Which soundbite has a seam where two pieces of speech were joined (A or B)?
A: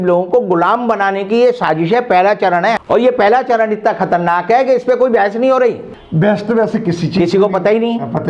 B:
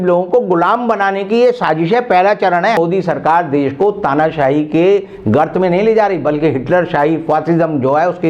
B